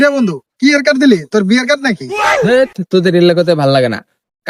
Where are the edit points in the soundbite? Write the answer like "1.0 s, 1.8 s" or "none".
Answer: none

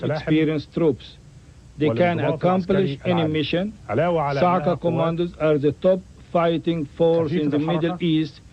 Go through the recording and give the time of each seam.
4.6 s

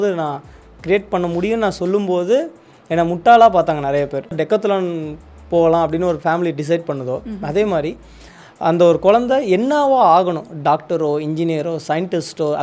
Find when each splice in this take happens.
4.4 s

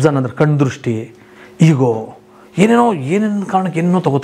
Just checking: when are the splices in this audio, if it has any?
none

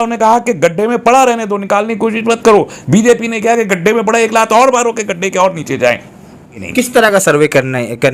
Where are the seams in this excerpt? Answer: 6.6 s

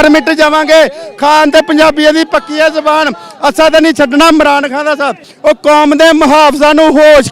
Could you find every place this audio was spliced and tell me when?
5.2 s

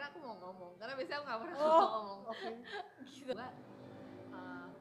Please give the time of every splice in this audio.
3.3 s

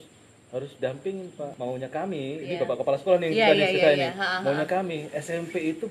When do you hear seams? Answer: 1.5 s

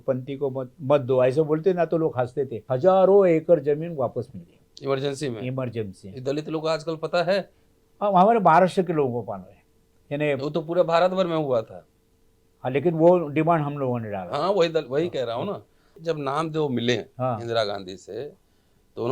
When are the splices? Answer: 2.6 s, 16.0 s

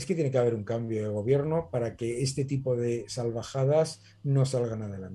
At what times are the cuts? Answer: none

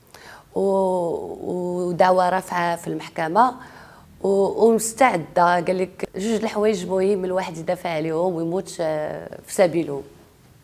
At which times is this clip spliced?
6.0 s

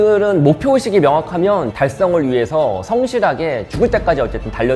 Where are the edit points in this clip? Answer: 1.7 s

